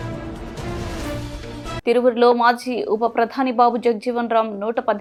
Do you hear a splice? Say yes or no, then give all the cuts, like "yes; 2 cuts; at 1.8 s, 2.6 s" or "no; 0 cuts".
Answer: no; 0 cuts